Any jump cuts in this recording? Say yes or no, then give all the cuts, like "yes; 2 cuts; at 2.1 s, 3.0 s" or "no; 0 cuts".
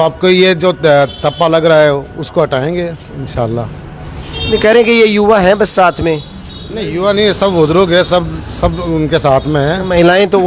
no; 0 cuts